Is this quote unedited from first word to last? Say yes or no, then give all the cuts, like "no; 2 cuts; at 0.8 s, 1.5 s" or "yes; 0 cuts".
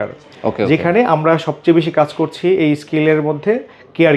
yes; 0 cuts